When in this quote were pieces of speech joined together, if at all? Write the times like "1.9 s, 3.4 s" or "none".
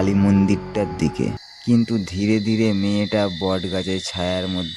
1.5 s